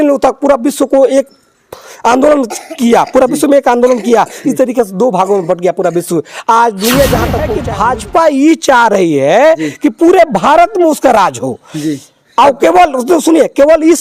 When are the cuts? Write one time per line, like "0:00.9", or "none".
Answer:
0:07.6